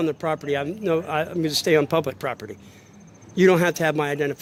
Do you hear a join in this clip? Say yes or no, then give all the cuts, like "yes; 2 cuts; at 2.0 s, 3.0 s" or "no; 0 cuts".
no; 0 cuts